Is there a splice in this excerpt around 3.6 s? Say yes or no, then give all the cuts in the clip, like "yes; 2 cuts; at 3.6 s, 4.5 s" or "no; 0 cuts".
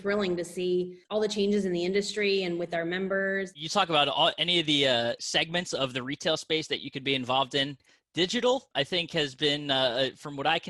yes; 4 cuts; at 1.0 s, 3.6 s, 5.2 s, 8.7 s